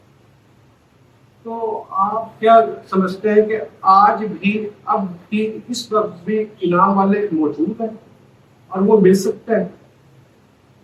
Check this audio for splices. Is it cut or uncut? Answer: uncut